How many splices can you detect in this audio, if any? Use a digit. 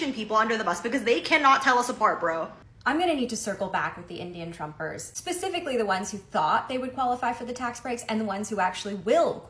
1